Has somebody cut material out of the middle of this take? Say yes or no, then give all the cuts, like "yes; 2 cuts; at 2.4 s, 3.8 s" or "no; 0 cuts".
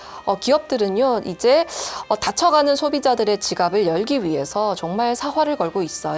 no; 0 cuts